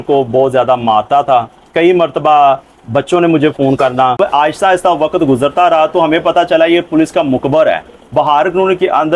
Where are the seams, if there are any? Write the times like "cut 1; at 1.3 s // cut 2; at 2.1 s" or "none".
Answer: cut 1; at 4.2 s